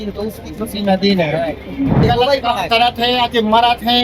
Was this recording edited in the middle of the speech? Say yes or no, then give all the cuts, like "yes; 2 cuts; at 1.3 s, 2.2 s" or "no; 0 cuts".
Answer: yes; 1 cut; at 2.1 s